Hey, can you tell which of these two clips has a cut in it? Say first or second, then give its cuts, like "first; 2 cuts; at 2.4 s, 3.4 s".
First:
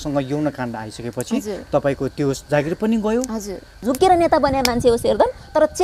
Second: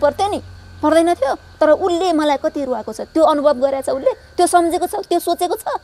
first; 1 cut; at 3.8 s